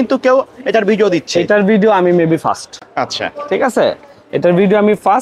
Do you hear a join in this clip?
no; 0 cuts

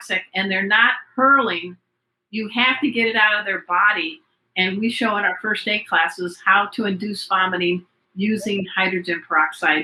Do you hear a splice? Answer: no; 0 cuts

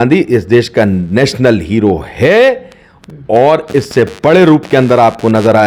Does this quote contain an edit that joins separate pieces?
no; 0 cuts

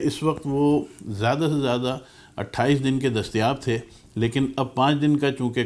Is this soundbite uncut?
yes; 0 cuts

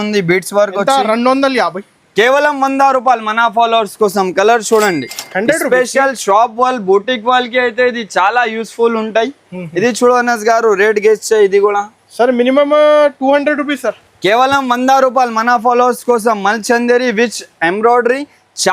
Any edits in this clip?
no; 0 cuts

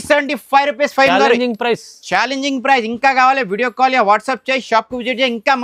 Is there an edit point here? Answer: no; 0 cuts

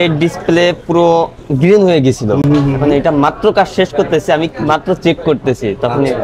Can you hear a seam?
no; 0 cuts

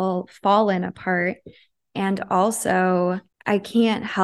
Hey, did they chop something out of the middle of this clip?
yes; 1 cut; at 3.3 s

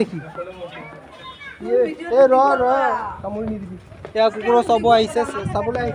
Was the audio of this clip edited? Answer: no; 0 cuts

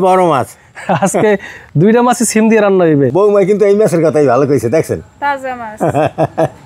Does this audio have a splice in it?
yes; 1 cut; at 3.1 s

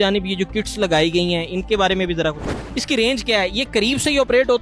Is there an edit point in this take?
yes; 1 cut; at 2.6 s

